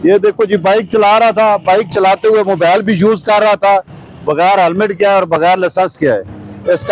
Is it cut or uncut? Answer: uncut